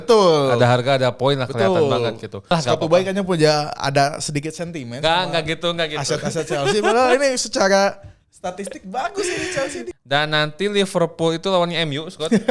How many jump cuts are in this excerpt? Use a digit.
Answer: 2